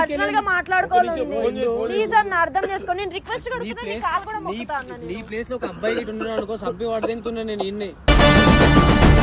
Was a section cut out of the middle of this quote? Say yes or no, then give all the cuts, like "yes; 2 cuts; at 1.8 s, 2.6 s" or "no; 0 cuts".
no; 0 cuts